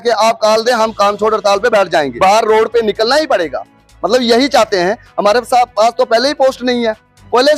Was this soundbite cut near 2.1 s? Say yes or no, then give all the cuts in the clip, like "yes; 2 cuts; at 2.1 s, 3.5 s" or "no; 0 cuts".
yes; 1 cut; at 2.1 s